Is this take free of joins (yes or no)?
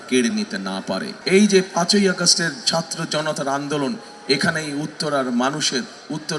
no